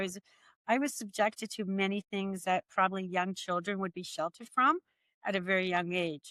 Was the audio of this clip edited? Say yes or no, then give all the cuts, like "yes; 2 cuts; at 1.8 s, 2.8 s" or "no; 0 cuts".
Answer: no; 0 cuts